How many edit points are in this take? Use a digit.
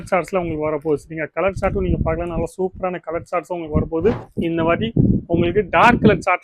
1